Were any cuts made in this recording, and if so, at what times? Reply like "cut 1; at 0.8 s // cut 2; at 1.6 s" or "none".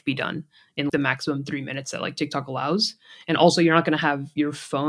cut 1; at 0.9 s